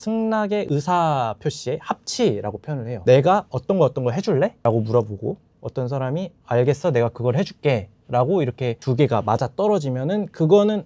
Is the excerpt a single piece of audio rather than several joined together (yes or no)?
yes